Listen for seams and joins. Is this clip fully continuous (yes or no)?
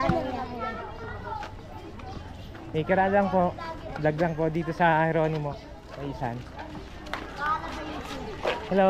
yes